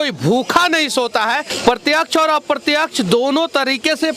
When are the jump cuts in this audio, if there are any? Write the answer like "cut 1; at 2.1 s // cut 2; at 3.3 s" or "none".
cut 1; at 1.5 s